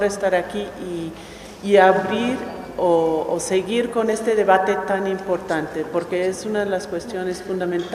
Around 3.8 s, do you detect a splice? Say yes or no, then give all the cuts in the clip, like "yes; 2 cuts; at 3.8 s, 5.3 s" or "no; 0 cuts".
yes; 1 cut; at 3.8 s